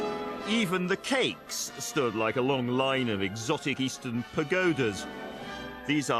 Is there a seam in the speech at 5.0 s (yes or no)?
yes